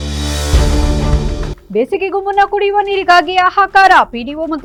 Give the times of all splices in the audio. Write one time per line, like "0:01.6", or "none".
none